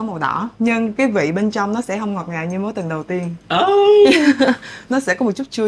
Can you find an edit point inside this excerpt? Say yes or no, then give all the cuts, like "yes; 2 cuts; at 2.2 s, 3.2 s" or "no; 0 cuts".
no; 0 cuts